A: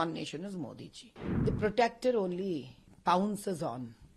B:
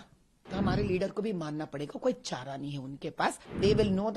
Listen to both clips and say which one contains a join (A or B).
A